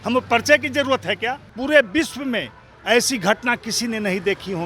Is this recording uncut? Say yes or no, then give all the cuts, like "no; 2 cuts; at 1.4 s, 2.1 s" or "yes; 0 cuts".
no; 1 cut; at 1.5 s